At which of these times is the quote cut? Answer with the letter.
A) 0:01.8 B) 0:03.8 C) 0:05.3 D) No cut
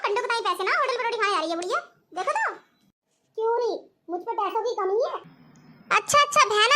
C